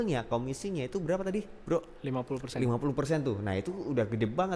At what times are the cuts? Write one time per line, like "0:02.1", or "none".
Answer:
none